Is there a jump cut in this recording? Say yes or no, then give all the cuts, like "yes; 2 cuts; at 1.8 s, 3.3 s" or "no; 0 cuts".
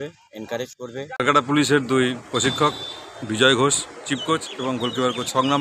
yes; 1 cut; at 1.2 s